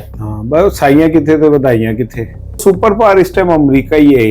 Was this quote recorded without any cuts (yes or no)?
no